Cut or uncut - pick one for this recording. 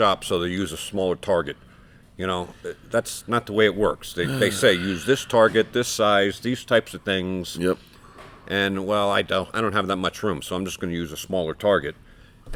uncut